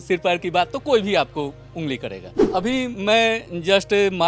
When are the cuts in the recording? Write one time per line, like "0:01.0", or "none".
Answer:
0:02.3